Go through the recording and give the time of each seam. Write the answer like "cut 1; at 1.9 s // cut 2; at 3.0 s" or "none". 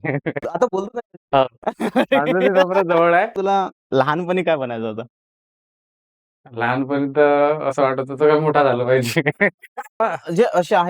cut 1; at 3.3 s // cut 2; at 10.0 s